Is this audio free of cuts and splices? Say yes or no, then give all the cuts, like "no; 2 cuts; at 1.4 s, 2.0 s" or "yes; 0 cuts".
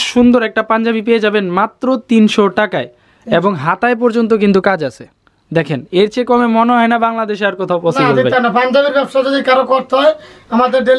yes; 0 cuts